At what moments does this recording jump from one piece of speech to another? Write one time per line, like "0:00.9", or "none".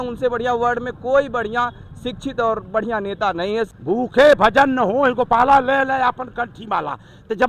0:03.7

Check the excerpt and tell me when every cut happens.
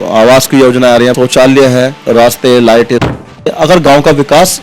0:01.2
0:02.0
0:03.2

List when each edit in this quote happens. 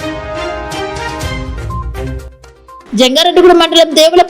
none

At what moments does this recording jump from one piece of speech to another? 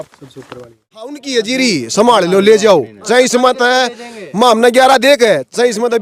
0:01.2

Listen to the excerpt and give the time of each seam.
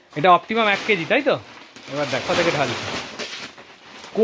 0:02.2

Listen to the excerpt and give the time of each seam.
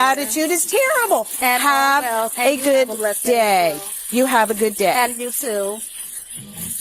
none

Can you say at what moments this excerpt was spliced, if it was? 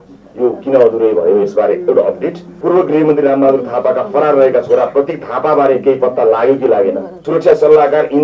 0:02.5
0:07.1

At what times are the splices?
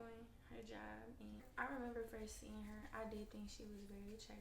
0:01.5

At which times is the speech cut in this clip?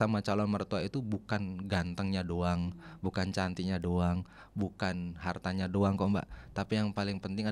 none

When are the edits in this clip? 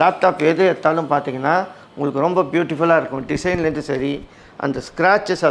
none

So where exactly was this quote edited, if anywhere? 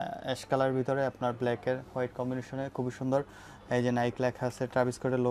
none

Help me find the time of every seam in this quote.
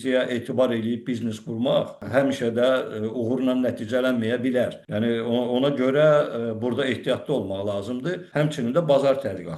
0:02.0
0:04.8
0:08.2

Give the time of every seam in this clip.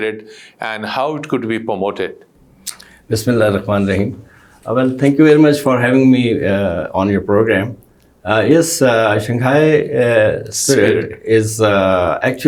none

